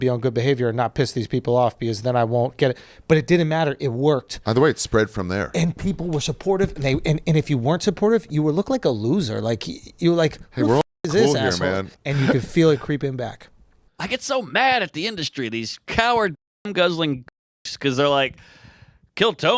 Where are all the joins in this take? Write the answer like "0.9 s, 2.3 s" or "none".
11.9 s, 13.9 s